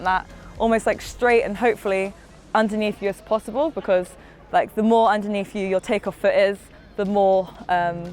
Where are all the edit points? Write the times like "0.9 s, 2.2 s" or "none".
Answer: none